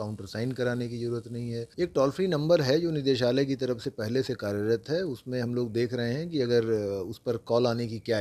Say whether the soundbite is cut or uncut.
cut